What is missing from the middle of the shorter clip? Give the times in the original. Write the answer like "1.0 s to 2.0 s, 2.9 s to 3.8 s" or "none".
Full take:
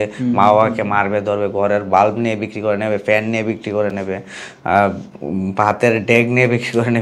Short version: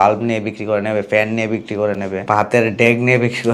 4.2 s to 5.5 s